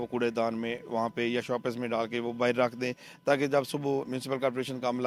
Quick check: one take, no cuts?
yes; 0 cuts

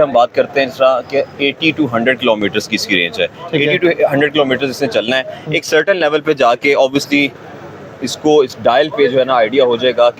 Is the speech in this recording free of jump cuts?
yes; 0 cuts

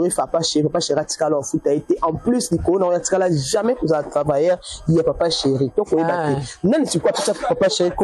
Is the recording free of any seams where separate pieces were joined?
yes; 0 cuts

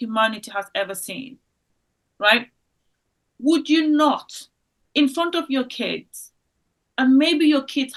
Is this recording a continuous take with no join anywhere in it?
yes; 0 cuts

